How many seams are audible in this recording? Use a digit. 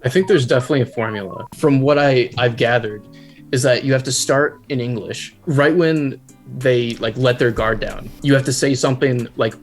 2